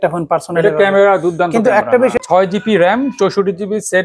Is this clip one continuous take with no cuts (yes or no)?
no